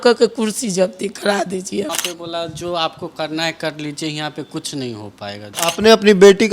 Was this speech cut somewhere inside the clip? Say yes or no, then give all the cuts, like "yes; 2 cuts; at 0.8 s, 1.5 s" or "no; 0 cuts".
yes; 2 cuts; at 1.9 s, 5.5 s